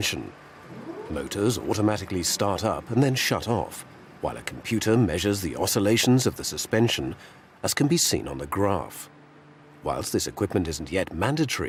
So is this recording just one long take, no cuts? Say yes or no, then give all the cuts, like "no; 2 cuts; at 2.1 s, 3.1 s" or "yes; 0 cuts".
yes; 0 cuts